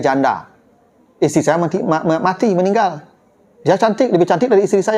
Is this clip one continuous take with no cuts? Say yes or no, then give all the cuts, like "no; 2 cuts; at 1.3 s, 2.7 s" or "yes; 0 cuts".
yes; 0 cuts